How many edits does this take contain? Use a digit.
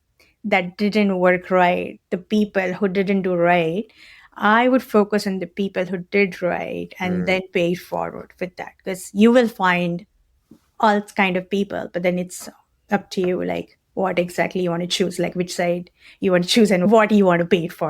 1